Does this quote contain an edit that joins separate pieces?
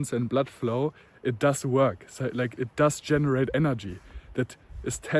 no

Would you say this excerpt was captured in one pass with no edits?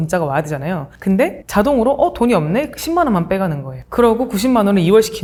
yes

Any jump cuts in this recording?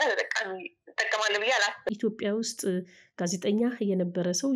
yes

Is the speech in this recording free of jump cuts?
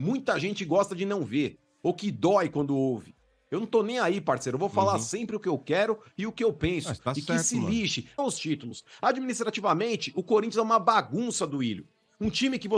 no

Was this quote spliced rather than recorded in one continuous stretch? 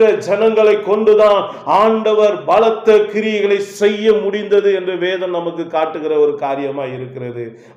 no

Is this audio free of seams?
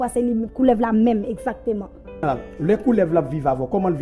no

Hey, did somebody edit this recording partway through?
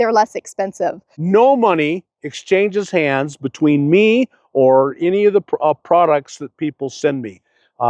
yes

